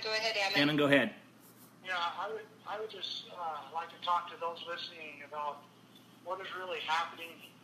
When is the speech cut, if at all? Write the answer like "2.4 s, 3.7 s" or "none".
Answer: 1.8 s